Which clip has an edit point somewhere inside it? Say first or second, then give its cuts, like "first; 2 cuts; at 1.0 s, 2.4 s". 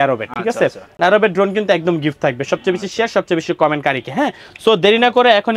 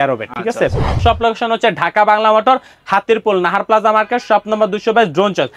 second; 1 cut; at 1.0 s